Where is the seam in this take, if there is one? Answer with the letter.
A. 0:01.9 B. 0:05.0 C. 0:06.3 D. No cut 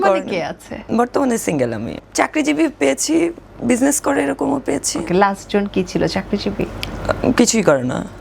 A